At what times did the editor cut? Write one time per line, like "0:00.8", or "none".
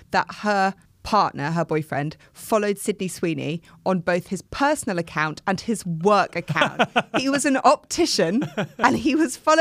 0:00.9

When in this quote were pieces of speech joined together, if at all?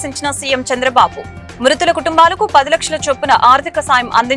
none

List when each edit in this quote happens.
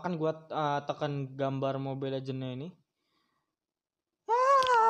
none

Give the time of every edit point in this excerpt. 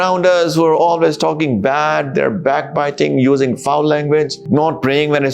0:04.4

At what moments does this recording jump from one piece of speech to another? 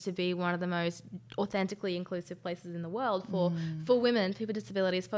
none

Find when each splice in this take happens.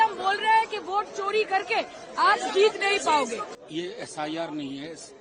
0:03.5

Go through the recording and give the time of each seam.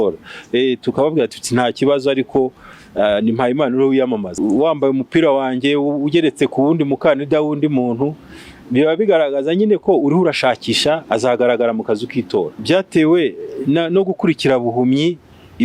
0:04.3
0:11.0
0:12.6

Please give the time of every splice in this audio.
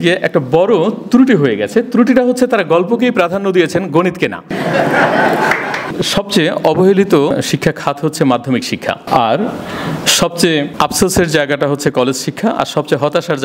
0:04.5
0:05.9
0:07.3
0:09.0
0:10.7

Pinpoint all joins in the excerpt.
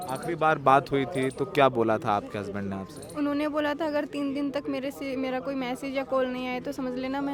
none

